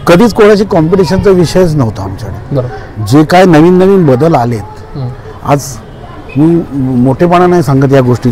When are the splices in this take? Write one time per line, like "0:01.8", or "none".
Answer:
none